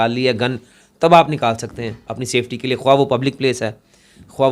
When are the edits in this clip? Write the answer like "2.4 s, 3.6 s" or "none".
none